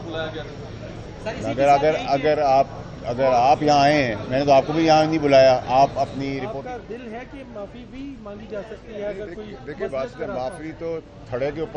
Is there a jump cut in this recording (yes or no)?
yes